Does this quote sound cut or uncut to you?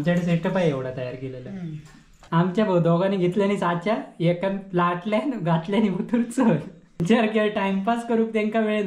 cut